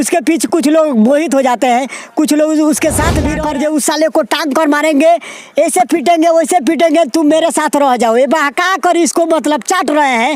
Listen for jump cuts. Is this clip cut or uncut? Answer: cut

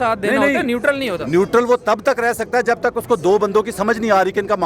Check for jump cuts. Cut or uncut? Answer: uncut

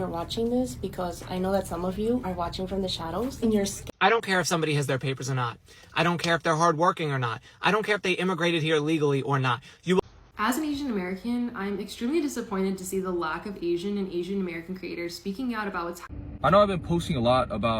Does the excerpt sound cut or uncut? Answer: cut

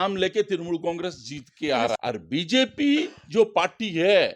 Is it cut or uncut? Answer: cut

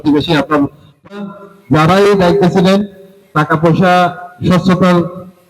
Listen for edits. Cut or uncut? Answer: cut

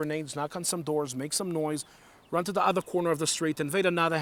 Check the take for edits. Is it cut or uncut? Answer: uncut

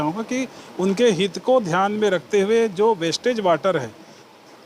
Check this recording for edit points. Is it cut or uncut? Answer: uncut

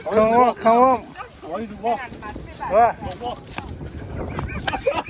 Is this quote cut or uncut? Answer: uncut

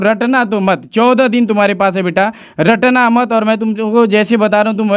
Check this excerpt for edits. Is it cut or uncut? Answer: uncut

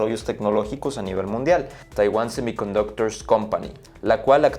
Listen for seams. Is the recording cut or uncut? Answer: cut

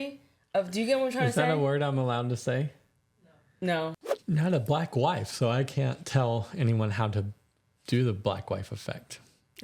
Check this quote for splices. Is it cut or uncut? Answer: cut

